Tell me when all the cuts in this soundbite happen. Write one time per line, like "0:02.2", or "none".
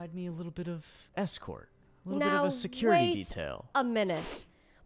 0:01.0